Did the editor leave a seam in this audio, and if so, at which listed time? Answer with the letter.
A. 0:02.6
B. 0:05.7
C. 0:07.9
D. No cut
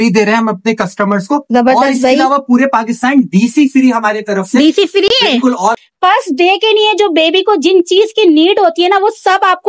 B